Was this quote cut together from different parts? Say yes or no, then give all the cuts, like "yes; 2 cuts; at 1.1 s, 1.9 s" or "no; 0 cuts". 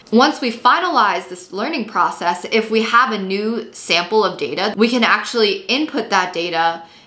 yes; 1 cut; at 4.7 s